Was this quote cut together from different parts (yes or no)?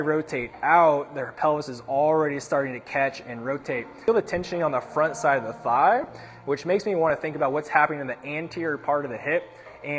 yes